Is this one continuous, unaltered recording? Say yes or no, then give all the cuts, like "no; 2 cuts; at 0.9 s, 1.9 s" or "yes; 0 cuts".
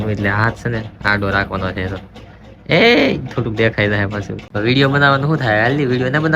no; 1 cut; at 4.4 s